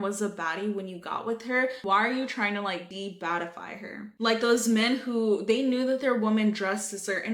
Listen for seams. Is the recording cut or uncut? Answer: uncut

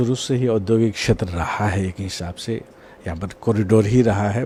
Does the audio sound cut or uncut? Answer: uncut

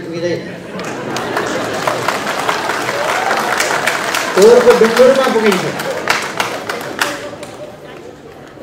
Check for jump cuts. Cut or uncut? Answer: uncut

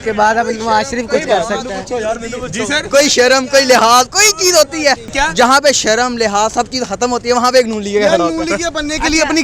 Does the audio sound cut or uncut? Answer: cut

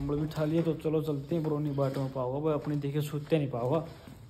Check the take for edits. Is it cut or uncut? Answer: uncut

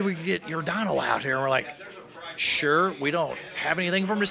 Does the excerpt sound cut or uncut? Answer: uncut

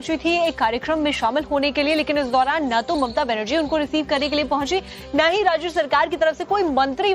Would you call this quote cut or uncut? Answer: cut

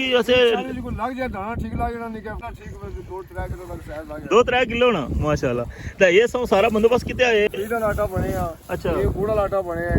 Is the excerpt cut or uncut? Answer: cut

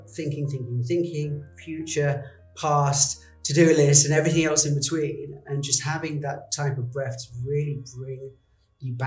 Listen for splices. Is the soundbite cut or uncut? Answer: uncut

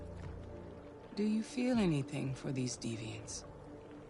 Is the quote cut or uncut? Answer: cut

